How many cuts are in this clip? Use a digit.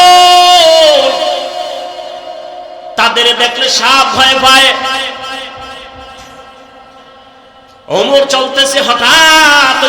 1